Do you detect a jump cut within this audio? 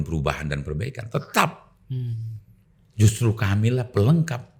no; 0 cuts

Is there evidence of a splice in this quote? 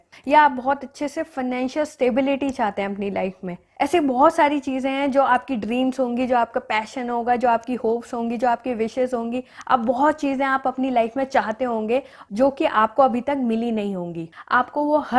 yes; 1 cut; at 14.3 s

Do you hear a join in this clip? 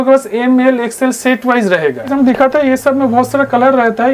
yes; 1 cut; at 2.1 s

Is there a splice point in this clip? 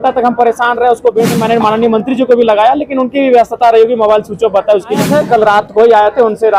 yes; 2 cuts; at 1.3 s, 5.1 s

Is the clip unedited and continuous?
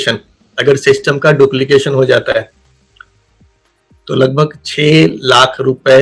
yes; 0 cuts

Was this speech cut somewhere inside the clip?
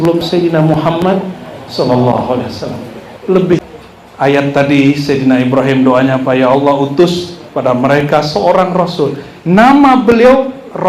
yes; 1 cut; at 3.7 s

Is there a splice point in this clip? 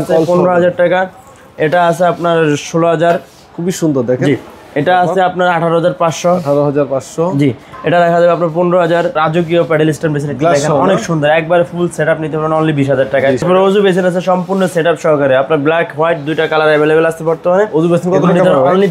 yes; 2 cuts; at 9.1 s, 13.4 s

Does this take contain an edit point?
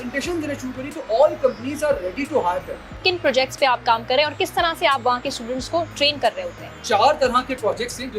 yes; 1 cut; at 3.0 s

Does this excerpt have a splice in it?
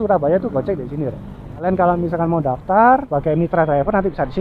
yes; 2 cuts; at 1.6 s, 3.1 s

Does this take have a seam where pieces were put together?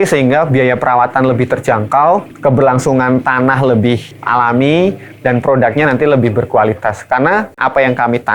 yes; 3 cuts; at 2.3 s, 4.1 s, 7.6 s

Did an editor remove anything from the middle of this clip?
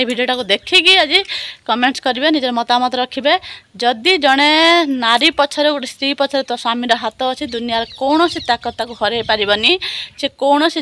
no; 0 cuts

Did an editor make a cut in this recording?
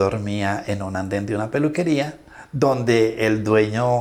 no; 0 cuts

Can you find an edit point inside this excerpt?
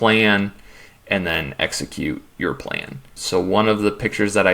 yes; 1 cut; at 3.1 s

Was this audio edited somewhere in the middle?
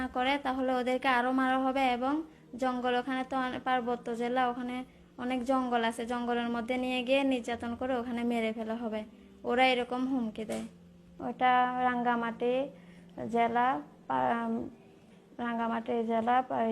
yes; 1 cut; at 11.3 s

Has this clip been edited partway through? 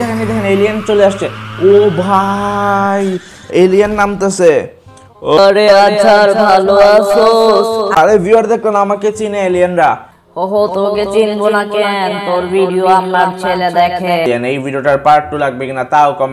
yes; 1 cut; at 14.2 s

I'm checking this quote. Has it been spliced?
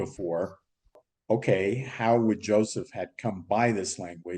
yes; 1 cut; at 1.0 s

